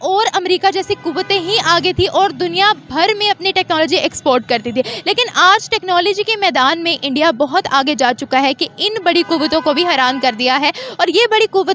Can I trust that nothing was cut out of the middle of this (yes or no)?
yes